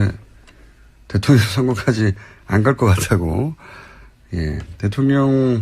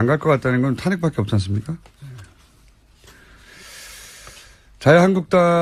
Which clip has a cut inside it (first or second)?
first